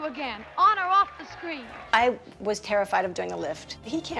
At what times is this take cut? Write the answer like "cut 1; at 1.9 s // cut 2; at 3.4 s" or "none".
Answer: cut 1; at 1.8 s